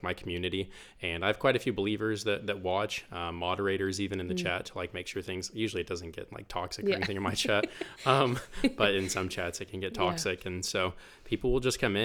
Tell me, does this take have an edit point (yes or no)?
no